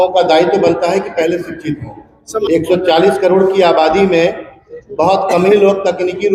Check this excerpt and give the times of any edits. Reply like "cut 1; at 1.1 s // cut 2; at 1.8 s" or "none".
cut 1; at 2.4 s